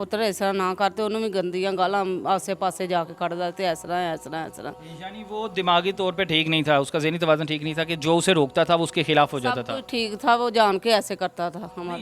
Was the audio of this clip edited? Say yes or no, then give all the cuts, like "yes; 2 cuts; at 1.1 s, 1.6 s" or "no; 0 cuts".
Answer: no; 0 cuts